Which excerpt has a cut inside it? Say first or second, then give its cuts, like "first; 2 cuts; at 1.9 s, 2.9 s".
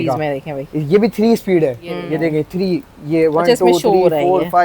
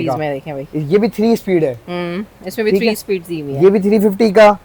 first; 1 cut; at 1.9 s